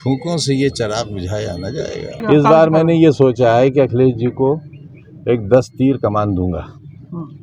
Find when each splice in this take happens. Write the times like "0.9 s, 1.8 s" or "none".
2.2 s